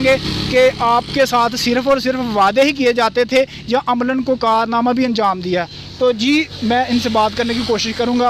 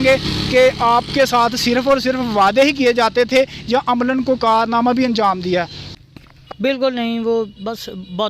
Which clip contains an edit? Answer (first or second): second